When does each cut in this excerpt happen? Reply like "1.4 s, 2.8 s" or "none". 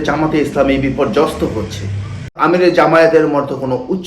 2.4 s